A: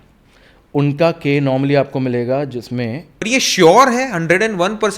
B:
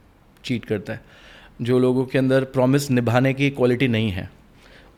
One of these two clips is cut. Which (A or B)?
A